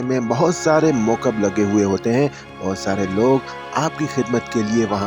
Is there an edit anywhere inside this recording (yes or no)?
no